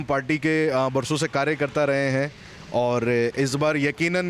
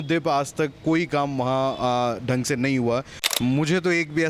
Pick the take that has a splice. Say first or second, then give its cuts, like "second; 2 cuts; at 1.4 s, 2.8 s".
second; 1 cut; at 3.2 s